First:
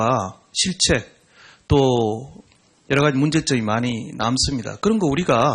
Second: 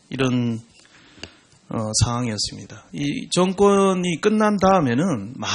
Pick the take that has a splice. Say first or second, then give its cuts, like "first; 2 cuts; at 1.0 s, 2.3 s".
second; 1 cut; at 3.5 s